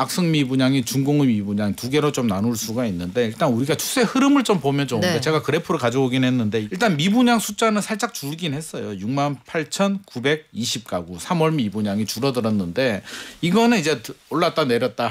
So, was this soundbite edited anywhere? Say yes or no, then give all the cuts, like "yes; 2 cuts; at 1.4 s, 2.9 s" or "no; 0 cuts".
yes; 1 cut; at 6.7 s